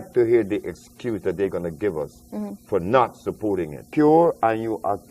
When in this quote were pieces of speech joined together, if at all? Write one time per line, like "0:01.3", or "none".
0:03.8